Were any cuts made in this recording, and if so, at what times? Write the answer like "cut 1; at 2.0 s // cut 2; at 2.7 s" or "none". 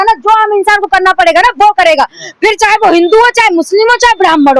none